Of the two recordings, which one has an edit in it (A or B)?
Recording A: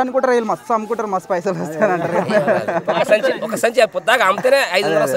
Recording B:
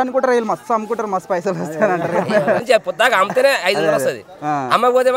B